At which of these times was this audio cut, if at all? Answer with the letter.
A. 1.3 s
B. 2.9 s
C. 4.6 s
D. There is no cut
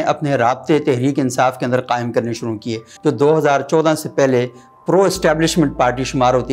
B